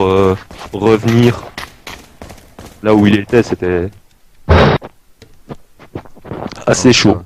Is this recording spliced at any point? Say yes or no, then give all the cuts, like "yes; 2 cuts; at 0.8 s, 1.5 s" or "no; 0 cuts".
yes; 1 cut; at 3.0 s